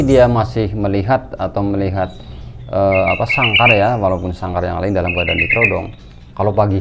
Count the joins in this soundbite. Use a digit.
0